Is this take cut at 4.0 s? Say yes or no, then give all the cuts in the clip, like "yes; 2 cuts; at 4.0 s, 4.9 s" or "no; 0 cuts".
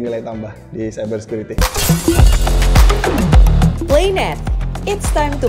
no; 1 cut; at 1.6 s